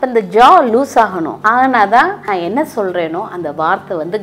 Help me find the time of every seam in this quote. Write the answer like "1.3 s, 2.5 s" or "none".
1.3 s, 2.2 s